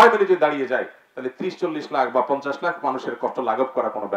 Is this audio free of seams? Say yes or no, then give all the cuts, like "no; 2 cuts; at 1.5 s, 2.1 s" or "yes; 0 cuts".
yes; 0 cuts